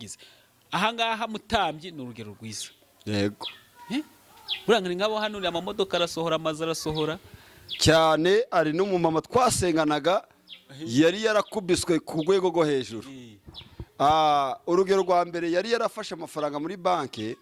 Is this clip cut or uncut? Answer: uncut